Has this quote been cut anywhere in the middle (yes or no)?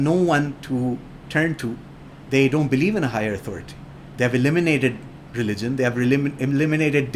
no